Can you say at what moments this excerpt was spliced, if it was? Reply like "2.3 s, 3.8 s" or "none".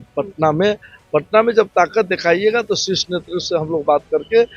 none